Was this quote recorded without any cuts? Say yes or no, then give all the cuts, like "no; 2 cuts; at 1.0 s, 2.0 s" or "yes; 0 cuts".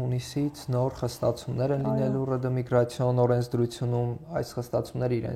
yes; 0 cuts